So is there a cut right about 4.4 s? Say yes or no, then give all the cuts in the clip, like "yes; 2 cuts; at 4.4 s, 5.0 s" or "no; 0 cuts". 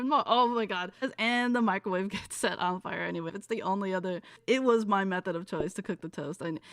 yes; 3 cuts; at 1.0 s, 3.3 s, 4.4 s